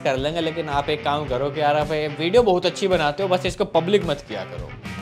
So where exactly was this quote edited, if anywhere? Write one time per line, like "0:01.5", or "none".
none